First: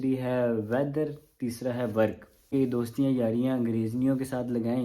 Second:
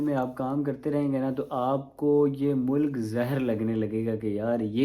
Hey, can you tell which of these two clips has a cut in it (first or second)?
first